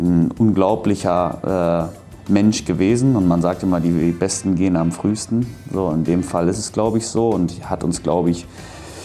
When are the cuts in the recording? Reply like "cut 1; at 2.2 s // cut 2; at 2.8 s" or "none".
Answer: none